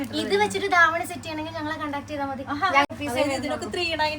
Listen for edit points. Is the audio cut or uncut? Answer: cut